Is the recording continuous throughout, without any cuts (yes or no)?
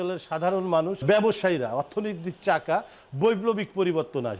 no